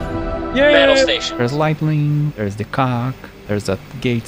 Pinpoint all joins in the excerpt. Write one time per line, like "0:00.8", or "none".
0:01.3
0:02.3
0:03.3